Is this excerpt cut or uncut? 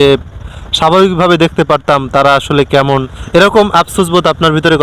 cut